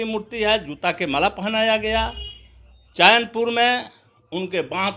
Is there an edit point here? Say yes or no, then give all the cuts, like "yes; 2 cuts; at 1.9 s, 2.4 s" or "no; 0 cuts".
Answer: no; 0 cuts